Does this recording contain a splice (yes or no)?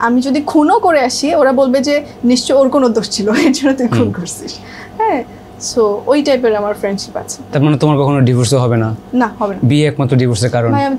no